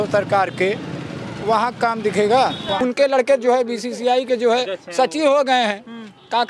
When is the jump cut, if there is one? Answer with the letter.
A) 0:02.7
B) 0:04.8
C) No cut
A